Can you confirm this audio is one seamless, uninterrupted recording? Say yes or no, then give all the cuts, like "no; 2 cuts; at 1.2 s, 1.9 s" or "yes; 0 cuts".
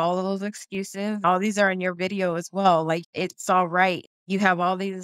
no; 3 cuts; at 1.2 s, 3.0 s, 4.0 s